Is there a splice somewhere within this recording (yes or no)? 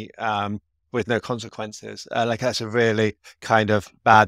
no